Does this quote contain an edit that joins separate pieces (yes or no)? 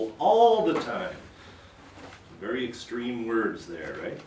no